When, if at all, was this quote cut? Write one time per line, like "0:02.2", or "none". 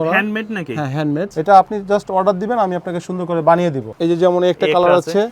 0:01.3
0:03.9